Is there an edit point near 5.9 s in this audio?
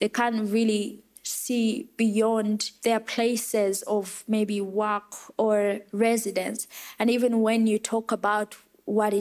yes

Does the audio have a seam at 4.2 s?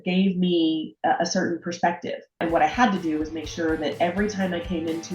no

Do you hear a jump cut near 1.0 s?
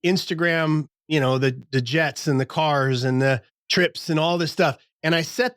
yes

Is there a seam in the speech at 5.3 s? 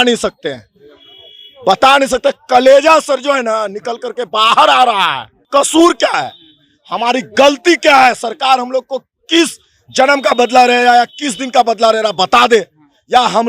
yes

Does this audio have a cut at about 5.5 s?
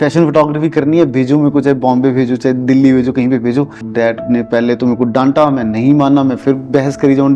no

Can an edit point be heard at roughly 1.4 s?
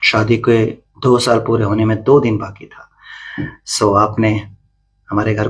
no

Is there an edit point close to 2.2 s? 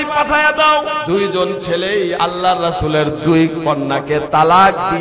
yes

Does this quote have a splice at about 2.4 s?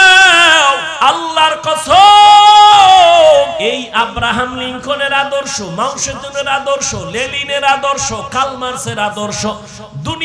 no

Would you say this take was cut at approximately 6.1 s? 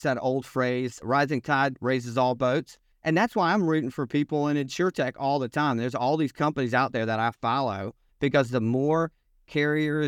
no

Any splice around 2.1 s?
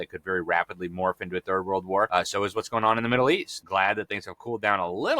yes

